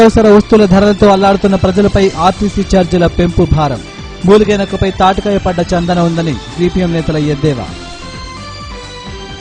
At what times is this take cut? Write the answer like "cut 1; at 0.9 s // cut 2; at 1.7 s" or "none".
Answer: none